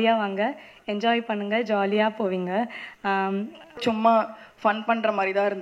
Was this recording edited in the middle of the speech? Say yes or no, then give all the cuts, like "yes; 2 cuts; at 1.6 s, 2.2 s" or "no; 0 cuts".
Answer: yes; 1 cut; at 3.8 s